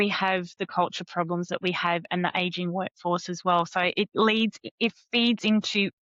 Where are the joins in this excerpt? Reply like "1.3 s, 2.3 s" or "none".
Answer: none